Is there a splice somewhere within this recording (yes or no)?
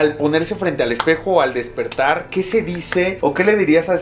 no